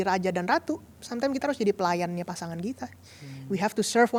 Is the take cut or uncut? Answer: uncut